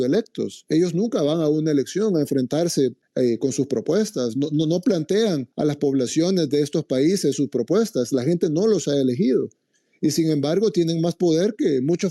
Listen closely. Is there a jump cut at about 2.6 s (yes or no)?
no